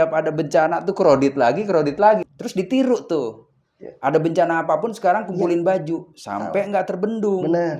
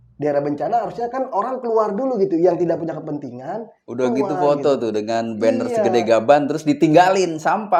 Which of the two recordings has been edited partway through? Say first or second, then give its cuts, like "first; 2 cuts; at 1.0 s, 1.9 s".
first; 1 cut; at 2.3 s